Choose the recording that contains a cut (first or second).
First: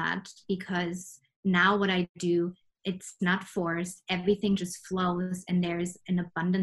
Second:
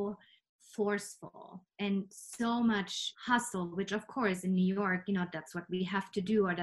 second